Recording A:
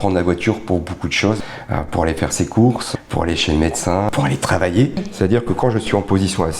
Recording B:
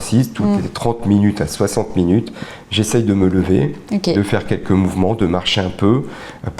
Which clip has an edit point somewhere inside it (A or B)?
A